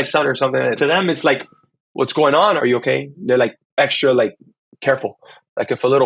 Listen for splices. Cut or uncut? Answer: cut